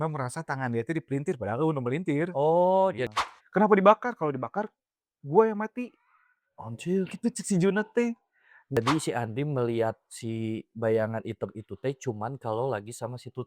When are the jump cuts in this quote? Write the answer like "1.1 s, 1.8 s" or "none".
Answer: 3.1 s, 8.8 s